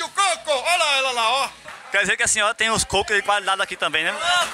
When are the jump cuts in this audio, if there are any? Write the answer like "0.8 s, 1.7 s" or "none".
none